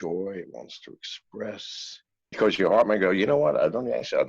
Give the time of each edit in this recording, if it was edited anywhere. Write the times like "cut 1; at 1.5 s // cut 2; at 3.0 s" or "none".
cut 1; at 2.3 s